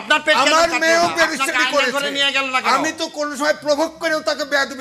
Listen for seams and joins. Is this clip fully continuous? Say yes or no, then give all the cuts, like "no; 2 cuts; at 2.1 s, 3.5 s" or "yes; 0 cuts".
yes; 0 cuts